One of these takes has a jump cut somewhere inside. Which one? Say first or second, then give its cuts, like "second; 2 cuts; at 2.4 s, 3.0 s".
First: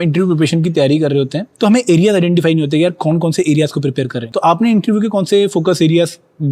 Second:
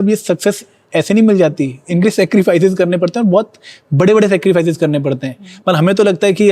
first; 2 cuts; at 1.4 s, 4.2 s